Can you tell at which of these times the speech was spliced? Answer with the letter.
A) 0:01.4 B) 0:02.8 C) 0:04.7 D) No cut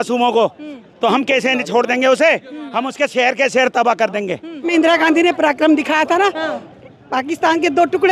C